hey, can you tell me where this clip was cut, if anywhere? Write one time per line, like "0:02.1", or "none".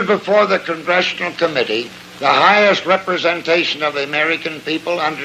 none